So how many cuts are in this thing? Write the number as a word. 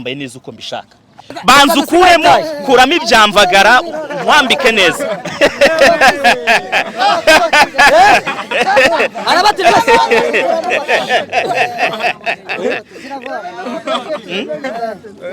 one